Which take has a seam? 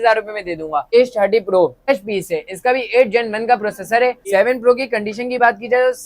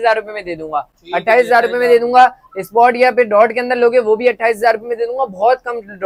first; 3 cuts; at 0.8 s, 1.9 s, 4.2 s

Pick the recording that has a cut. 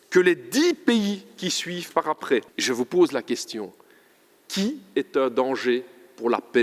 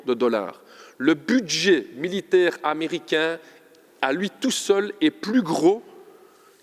first; 1 cut; at 2.5 s

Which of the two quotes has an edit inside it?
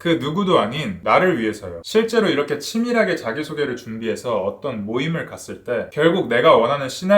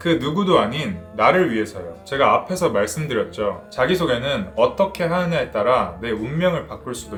first; 3 cuts; at 0.9 s, 1.7 s, 5.9 s

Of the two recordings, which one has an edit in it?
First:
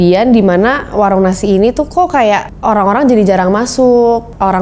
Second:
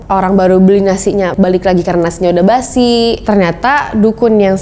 second; 2 cuts; at 1.3 s, 3.2 s

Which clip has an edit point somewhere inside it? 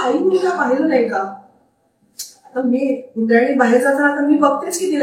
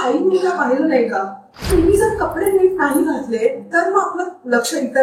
second; 1 cut; at 1.5 s

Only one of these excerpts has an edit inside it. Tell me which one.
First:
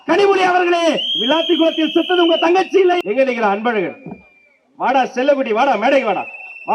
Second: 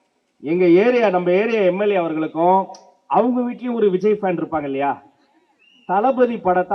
first; 1 cut; at 3.0 s

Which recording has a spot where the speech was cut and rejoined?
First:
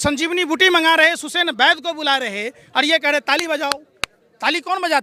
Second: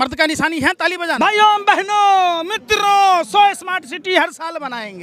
second; 1 cut; at 1.2 s

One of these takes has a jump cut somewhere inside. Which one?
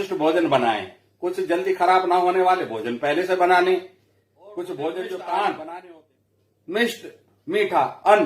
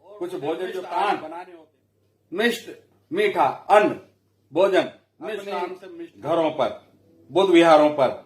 second; 1 cut; at 5.5 s

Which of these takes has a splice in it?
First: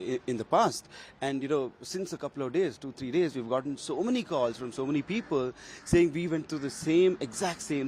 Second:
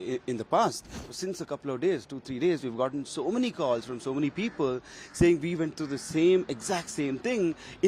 second; 1 cut; at 1.1 s

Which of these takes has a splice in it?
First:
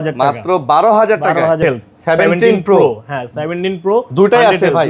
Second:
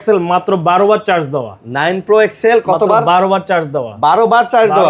first; 1 cut; at 1.6 s

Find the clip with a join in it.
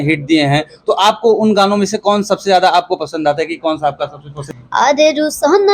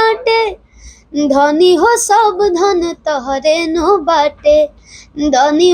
first; 1 cut; at 4.3 s

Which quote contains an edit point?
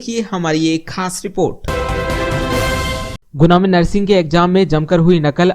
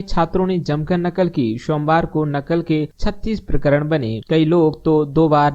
first; 2 cuts; at 1.6 s, 3.2 s

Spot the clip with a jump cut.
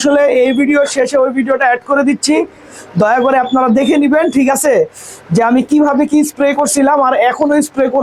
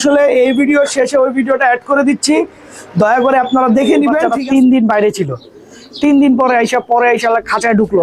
second; 1 cut; at 4.2 s

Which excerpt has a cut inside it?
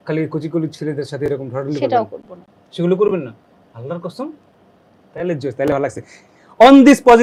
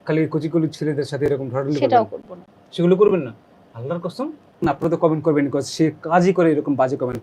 second; 1 cut; at 4.4 s

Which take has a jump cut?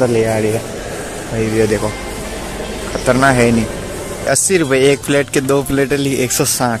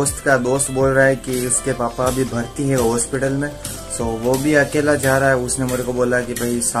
first; 1 cut; at 4.3 s

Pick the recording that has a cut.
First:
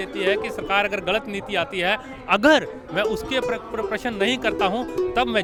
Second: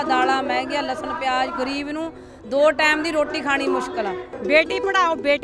second; 1 cut; at 4.3 s

